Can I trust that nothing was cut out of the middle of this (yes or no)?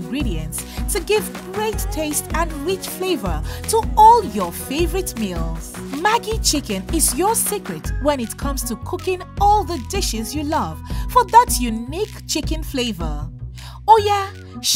yes